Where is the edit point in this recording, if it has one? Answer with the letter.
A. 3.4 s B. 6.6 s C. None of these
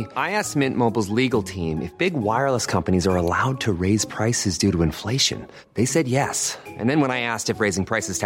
C